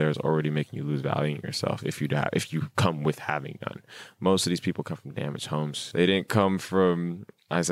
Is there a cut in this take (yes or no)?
yes